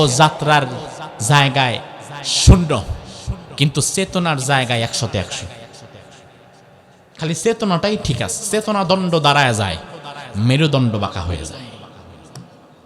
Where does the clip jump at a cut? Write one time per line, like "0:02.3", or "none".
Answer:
none